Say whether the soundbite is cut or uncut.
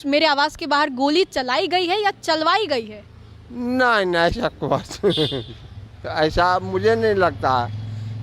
uncut